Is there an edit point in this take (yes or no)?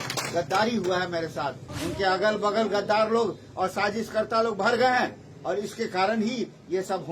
yes